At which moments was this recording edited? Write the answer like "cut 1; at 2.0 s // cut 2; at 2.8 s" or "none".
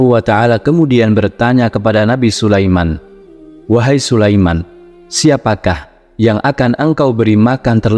none